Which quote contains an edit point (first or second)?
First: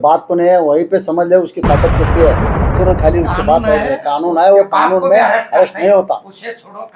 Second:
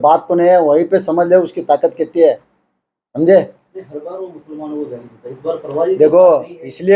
first